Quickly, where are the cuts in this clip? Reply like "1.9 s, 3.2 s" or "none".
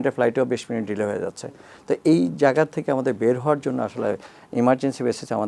none